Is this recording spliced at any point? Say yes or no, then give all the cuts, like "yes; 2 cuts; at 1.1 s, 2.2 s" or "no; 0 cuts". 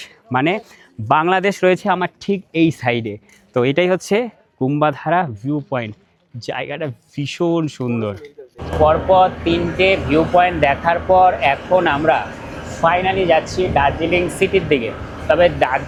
no; 0 cuts